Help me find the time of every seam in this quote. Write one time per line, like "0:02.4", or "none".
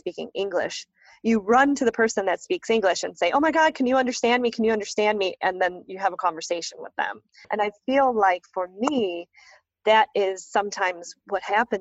0:07.4

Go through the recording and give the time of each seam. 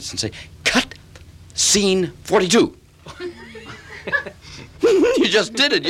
none

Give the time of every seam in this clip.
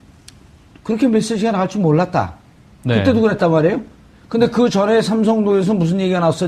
none

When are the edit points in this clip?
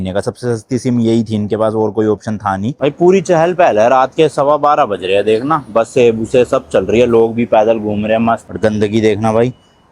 0:02.8
0:08.5

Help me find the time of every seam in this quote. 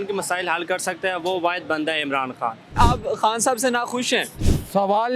0:02.8

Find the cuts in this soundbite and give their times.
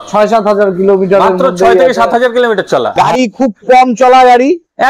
0:02.9

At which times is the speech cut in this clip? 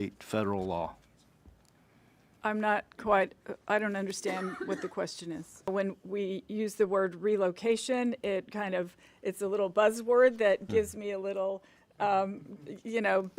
0:05.7

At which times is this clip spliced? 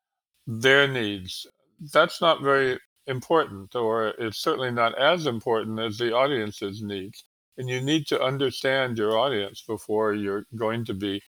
0:02.9

